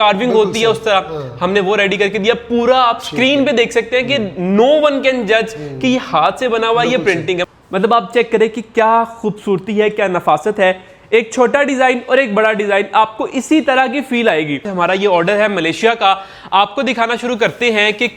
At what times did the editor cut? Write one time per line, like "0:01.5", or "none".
0:07.4
0:14.7